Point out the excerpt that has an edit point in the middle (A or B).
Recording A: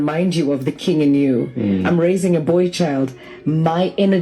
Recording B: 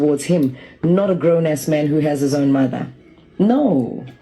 A